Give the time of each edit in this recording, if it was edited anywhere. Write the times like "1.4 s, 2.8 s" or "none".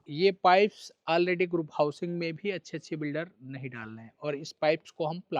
none